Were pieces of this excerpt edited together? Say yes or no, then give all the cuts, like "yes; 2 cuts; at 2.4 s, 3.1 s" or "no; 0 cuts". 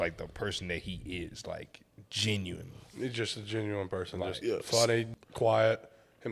yes; 1 cut; at 5.1 s